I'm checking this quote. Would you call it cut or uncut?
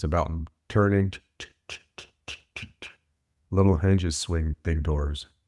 cut